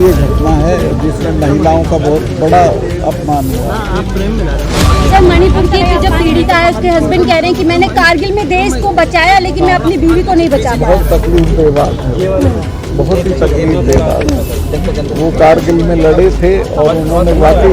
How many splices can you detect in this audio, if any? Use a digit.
1